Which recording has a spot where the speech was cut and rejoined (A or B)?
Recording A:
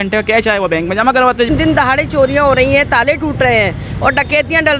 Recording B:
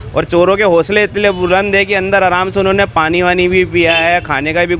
A